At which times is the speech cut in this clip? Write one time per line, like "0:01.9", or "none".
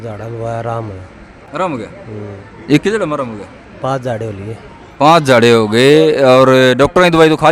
none